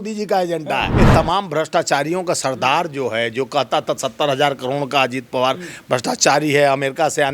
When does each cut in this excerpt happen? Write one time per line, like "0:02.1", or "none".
0:00.9

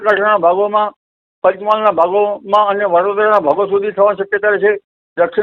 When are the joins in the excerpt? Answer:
none

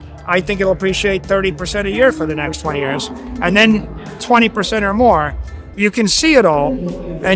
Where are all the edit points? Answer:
0:05.6

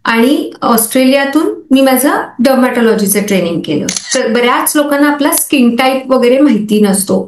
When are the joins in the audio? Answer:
0:04.0

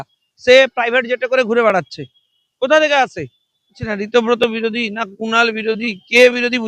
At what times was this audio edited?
0:03.7

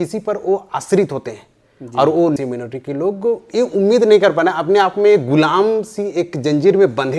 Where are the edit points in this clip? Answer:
0:02.4

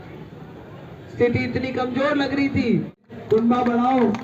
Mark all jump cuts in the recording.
0:03.1

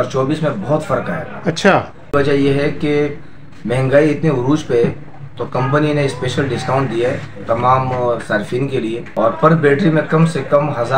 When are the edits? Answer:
0:02.1
0:07.3
0:09.1

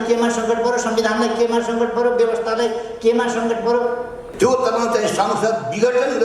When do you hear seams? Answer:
0:04.2

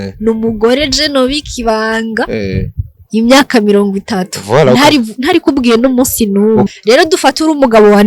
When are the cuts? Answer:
0:06.7

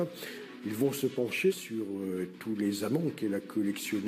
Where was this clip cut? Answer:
0:01.5

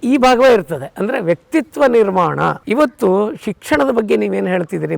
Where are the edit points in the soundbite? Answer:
0:02.6

